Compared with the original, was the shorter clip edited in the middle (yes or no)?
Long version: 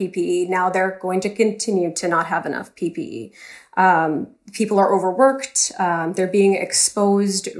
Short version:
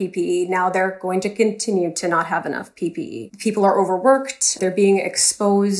yes